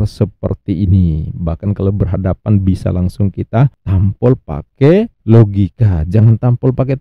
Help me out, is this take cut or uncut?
uncut